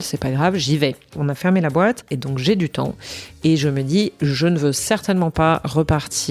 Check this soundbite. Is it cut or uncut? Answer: cut